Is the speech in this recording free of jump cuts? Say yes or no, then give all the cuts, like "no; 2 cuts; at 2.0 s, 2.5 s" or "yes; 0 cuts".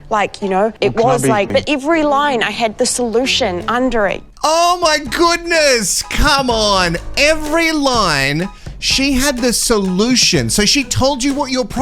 no; 1 cut; at 1.5 s